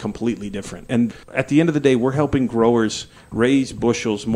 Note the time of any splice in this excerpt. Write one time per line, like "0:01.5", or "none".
0:01.1